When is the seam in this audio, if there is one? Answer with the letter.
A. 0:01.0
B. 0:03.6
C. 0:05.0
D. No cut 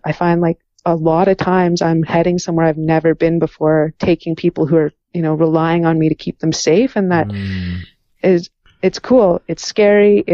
C